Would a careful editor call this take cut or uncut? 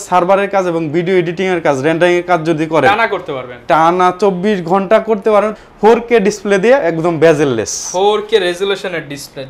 cut